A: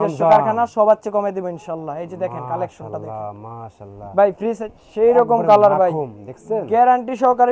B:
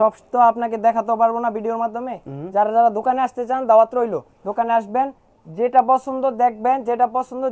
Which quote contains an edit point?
A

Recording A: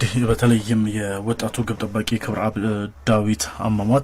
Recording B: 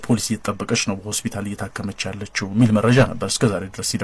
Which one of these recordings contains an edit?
B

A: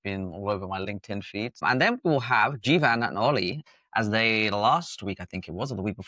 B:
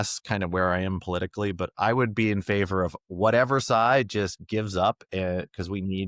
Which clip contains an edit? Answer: A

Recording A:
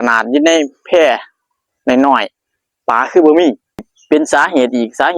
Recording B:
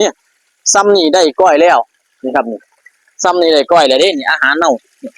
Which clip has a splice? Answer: A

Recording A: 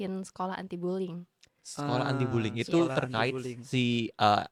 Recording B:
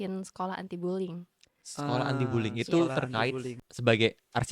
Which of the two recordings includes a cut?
B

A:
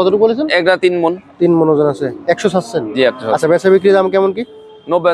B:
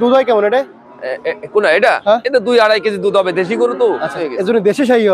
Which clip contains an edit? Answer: B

